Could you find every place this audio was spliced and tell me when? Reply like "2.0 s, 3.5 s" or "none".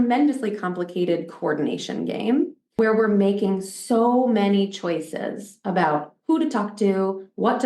2.8 s